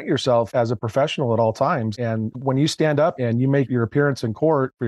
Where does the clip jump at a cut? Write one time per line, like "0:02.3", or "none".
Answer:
0:01.9
0:03.2